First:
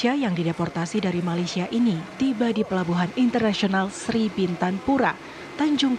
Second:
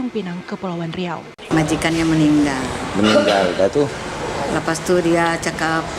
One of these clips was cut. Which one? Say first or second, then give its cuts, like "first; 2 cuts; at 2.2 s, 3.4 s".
second; 1 cut; at 1.3 s